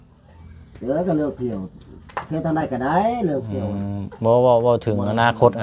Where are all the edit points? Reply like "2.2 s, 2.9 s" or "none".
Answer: none